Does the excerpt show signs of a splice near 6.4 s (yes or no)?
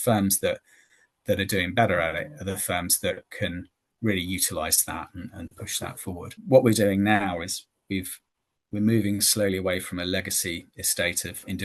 yes